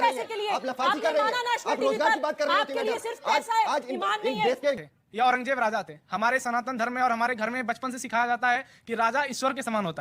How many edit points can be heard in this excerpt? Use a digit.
1